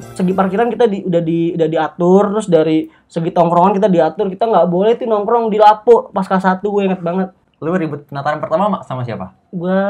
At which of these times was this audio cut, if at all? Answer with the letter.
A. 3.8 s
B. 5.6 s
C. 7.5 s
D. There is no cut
C